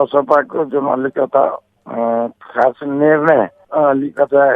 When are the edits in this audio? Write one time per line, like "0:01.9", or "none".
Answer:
none